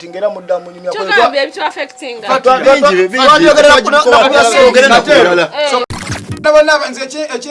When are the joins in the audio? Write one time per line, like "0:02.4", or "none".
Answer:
0:06.4